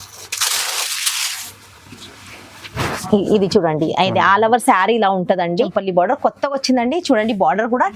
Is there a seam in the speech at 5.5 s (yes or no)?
yes